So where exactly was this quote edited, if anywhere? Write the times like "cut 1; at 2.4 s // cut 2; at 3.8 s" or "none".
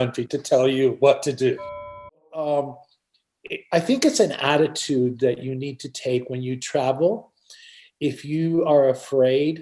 cut 1; at 2.2 s